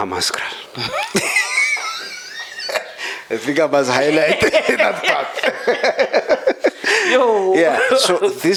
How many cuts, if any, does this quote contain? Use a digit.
0